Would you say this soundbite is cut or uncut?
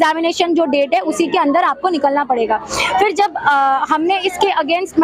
uncut